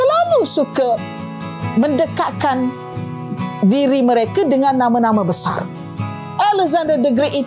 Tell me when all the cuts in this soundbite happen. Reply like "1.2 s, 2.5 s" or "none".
none